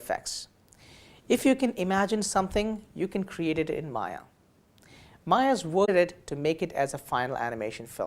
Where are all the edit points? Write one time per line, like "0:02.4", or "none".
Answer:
0:05.9